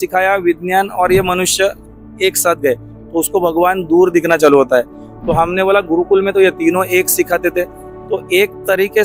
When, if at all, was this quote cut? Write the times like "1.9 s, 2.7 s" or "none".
none